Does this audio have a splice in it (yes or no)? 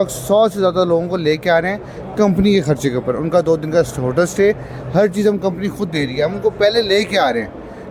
no